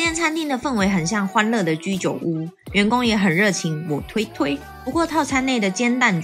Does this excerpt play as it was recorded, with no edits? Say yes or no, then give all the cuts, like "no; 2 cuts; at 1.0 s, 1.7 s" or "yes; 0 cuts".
yes; 0 cuts